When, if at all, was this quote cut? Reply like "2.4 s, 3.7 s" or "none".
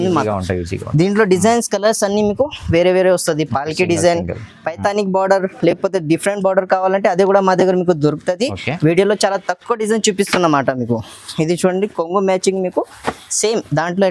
none

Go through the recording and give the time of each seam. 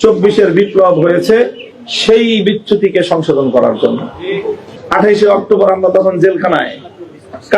4.7 s

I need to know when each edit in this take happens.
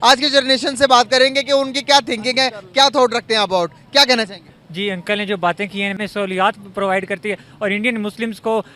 6.0 s

